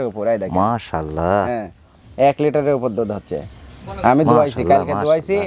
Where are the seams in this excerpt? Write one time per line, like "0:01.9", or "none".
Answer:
none